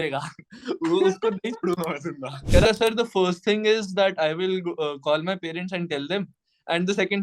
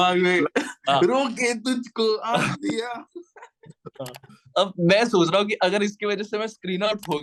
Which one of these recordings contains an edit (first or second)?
first